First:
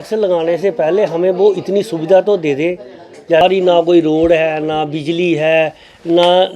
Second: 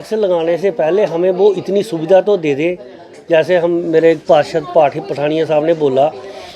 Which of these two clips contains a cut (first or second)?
first